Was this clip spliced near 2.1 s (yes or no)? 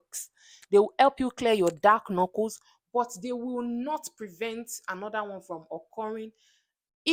no